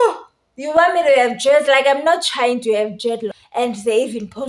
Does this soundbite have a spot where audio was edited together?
yes; 1 cut; at 3.4 s

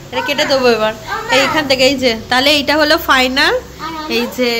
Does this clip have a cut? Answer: no; 0 cuts

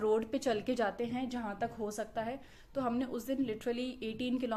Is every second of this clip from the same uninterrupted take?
yes; 0 cuts

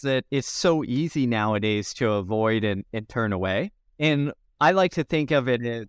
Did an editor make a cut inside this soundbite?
yes; 1 cut; at 4.4 s

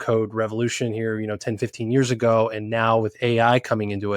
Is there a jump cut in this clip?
no; 0 cuts

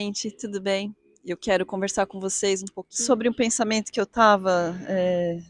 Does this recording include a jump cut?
yes; 2 cuts; at 1.1 s, 2.8 s

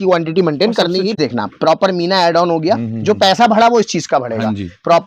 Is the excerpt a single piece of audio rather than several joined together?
no; 1 cut; at 1.2 s

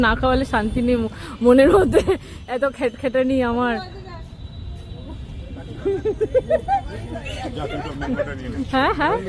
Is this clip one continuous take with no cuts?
yes; 0 cuts

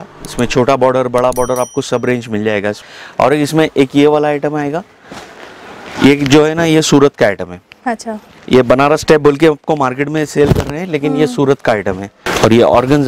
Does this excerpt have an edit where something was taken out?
yes; 2 cuts; at 2.9 s, 12.1 s

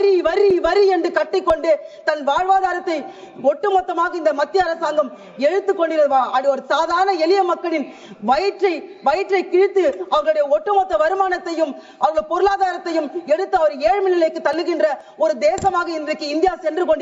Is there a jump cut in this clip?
no; 0 cuts

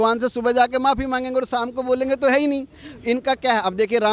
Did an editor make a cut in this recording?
no; 0 cuts

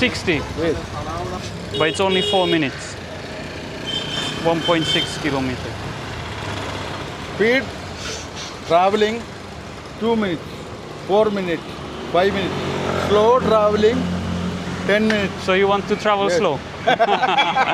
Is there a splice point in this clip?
no; 0 cuts

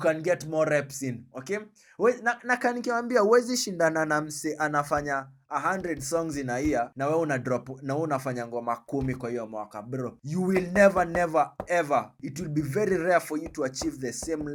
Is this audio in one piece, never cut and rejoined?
yes; 0 cuts

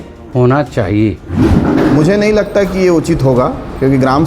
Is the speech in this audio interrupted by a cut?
yes; 1 cut; at 1.4 s

